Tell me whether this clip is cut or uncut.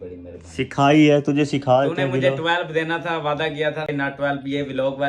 uncut